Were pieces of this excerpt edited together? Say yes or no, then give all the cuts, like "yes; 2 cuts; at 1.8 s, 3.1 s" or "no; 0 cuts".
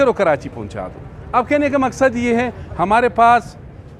no; 0 cuts